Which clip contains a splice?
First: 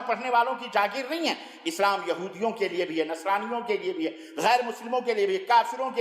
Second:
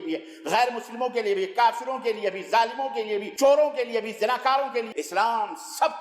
second; 2 cuts; at 3.3 s, 4.9 s

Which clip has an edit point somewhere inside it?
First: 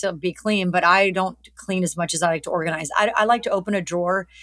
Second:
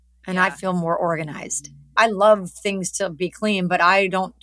second; 1 cut; at 1.9 s

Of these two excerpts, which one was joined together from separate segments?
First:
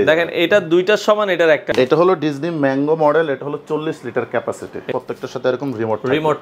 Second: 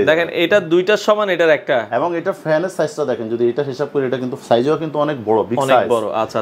first; 2 cuts; at 1.7 s, 4.8 s

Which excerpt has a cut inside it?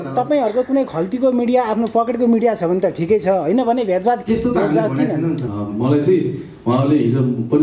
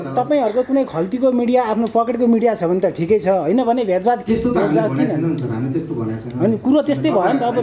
first; 1 cut; at 5.5 s

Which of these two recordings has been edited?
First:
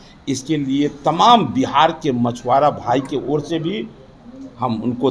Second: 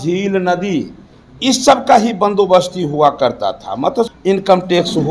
second; 1 cut; at 4.1 s

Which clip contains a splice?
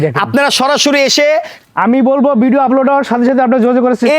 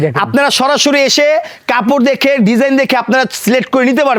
first; 1 cut; at 1.6 s

